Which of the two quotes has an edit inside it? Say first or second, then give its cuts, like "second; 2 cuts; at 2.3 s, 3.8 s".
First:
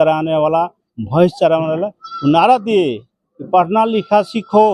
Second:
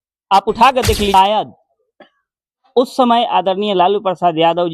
second; 1 cut; at 1.1 s